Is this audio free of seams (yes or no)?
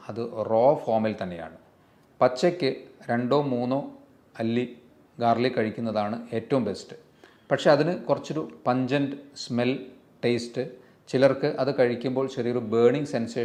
yes